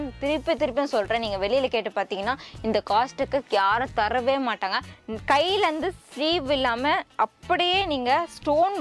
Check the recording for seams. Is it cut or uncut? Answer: cut